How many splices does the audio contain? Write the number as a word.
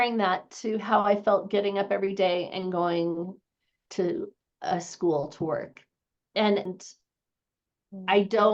one